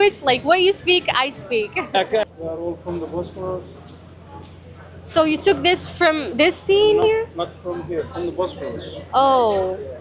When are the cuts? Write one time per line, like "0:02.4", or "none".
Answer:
0:02.3